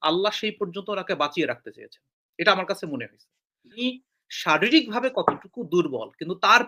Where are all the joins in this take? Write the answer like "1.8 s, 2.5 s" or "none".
3.8 s

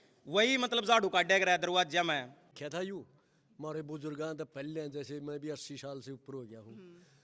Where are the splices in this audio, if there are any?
2.5 s

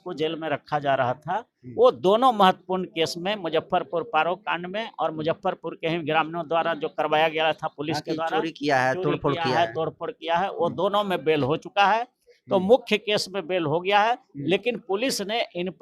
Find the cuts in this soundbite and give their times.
none

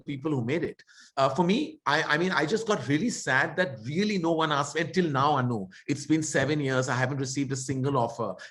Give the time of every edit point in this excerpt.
none

